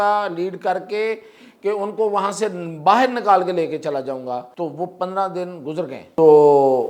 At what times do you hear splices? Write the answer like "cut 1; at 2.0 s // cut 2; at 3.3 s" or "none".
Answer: cut 1; at 4.5 s // cut 2; at 6.0 s